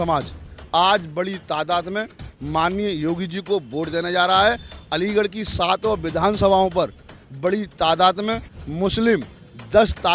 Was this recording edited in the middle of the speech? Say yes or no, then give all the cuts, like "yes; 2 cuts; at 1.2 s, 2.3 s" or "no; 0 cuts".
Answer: no; 0 cuts